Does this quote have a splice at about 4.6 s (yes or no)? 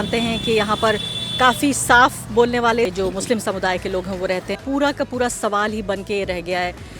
yes